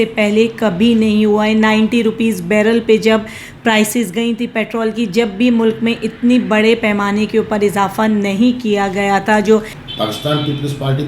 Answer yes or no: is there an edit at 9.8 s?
yes